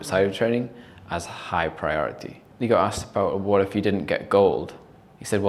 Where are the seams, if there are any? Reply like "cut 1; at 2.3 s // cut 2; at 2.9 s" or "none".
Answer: cut 1; at 2.4 s